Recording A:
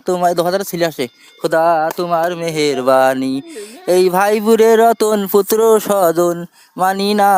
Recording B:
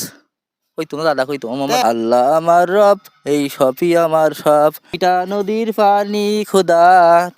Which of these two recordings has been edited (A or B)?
B